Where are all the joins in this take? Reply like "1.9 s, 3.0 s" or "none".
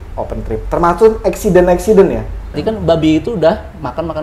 2.6 s

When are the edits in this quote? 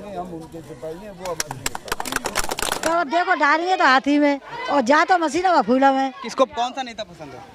2.8 s, 6.3 s

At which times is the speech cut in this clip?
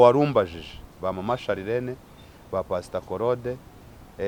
none

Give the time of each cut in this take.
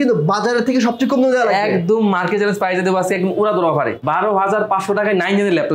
4.0 s

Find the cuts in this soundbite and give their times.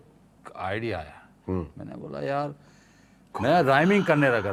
none

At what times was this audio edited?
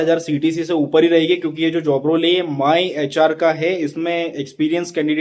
none

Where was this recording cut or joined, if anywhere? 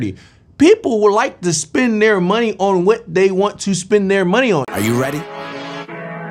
4.7 s

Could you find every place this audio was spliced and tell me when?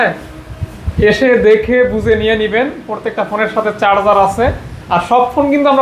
none

